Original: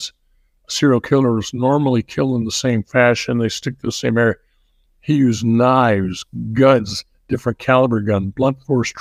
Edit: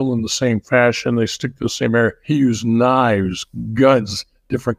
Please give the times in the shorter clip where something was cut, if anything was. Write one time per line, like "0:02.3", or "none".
0:02.2